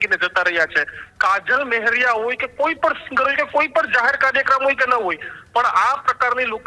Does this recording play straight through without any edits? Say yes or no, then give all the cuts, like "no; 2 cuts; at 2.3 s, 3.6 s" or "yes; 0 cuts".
no; 1 cut; at 1.1 s